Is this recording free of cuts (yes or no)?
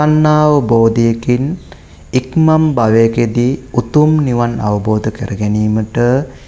yes